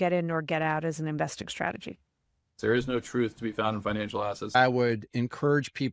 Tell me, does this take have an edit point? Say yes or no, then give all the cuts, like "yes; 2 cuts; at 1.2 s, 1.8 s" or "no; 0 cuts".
yes; 2 cuts; at 2.5 s, 4.6 s